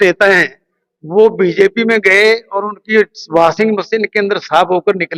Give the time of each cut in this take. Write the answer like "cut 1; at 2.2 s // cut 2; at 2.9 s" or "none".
none